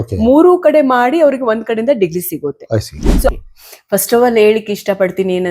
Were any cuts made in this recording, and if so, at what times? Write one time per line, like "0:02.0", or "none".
0:03.3